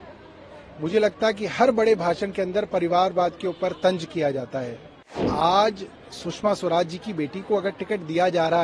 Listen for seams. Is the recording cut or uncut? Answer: cut